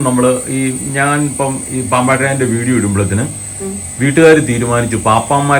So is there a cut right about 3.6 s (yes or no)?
no